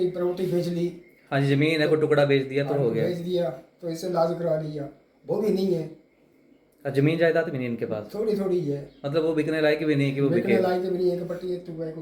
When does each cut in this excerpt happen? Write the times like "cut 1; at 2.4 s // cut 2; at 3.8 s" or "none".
none

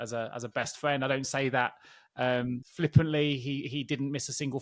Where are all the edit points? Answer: none

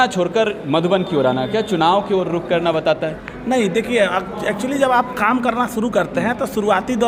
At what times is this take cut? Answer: none

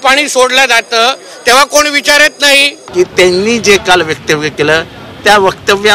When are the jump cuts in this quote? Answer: cut 1; at 2.8 s

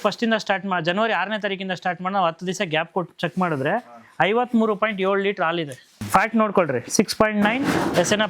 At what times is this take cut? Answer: cut 1; at 5.9 s

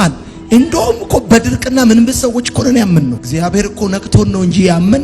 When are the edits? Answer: cut 1; at 3.2 s

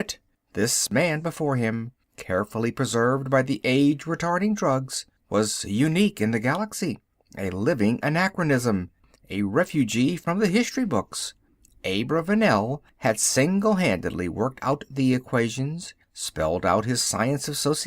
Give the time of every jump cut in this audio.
none

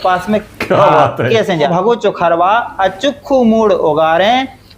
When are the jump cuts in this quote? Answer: cut 1; at 1.7 s

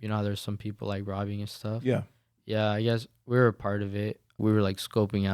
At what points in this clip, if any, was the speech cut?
cut 1; at 4.4 s

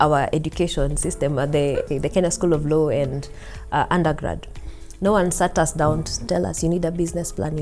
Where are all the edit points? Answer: cut 1; at 1.8 s // cut 2; at 6.2 s

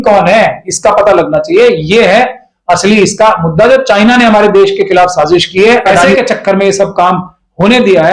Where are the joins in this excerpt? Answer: cut 1; at 6.1 s

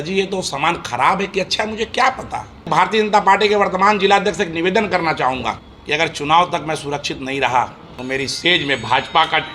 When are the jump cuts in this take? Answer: cut 1; at 2.7 s // cut 2; at 5.7 s // cut 3; at 7.9 s

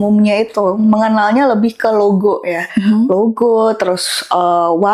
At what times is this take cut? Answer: none

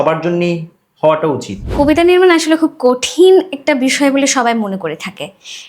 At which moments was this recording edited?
cut 1; at 1.6 s

